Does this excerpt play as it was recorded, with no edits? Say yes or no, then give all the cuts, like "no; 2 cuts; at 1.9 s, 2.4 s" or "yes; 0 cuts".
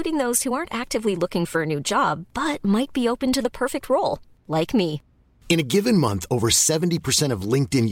yes; 0 cuts